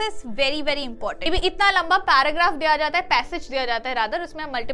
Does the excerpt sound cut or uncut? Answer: cut